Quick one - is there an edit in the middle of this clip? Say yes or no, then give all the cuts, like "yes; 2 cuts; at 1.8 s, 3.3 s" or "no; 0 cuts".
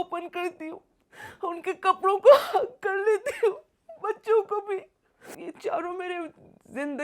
yes; 1 cut; at 5.3 s